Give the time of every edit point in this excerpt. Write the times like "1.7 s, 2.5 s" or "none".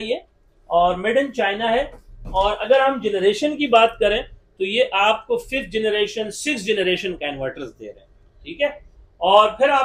none